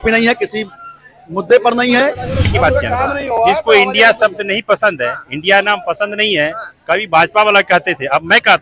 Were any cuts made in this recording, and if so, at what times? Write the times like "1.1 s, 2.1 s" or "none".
2.5 s